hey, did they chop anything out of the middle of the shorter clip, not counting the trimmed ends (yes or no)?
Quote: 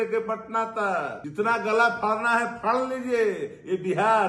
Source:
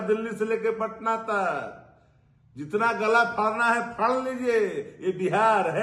yes